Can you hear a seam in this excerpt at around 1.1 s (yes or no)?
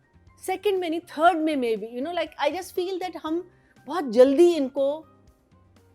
no